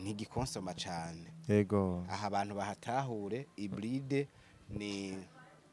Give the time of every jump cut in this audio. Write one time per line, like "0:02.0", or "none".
none